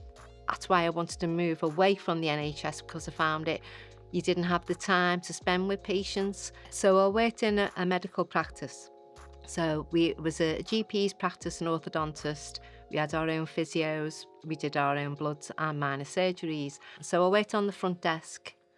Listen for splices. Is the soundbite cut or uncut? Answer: uncut